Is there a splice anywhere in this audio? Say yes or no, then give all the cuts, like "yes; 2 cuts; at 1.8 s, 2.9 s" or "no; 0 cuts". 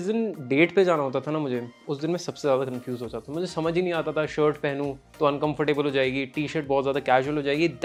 no; 0 cuts